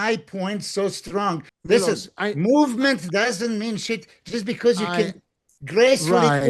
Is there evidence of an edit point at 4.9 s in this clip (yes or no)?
no